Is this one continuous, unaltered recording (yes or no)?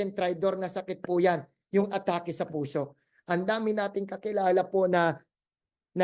yes